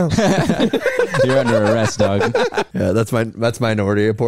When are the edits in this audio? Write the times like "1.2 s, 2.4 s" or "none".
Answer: 2.7 s

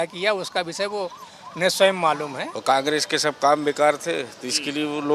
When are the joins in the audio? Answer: 2.5 s

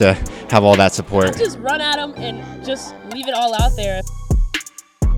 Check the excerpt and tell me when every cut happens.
1.3 s

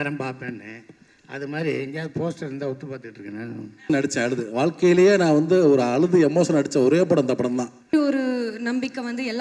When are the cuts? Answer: 3.9 s, 7.9 s

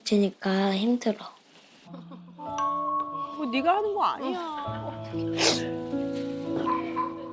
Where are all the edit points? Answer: none

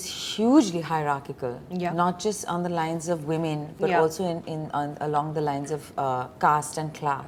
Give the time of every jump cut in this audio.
none

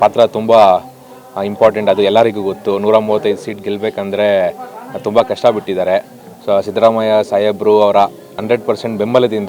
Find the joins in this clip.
8.4 s

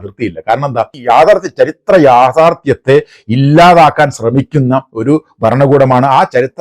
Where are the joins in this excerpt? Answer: 0.9 s

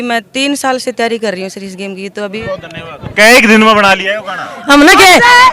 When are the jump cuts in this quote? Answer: 2.3 s

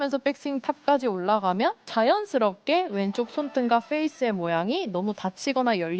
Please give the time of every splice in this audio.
1.8 s

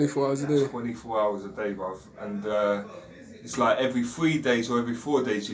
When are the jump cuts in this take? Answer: none

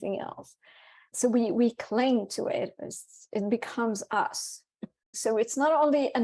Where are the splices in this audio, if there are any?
4.9 s

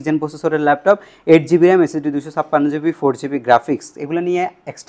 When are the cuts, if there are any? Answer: none

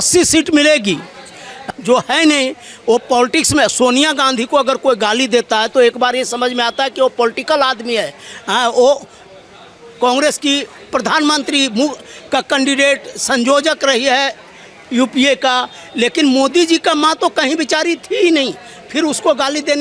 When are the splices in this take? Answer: 1.6 s

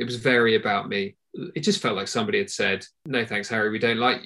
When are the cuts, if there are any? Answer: 1.2 s, 2.9 s

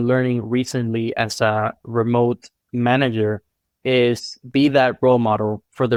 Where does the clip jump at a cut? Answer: none

